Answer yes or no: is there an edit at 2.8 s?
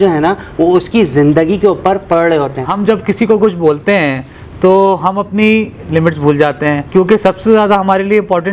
yes